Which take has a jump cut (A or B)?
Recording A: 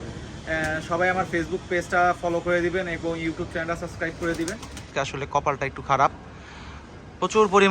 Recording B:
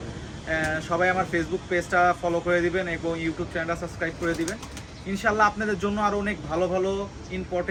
A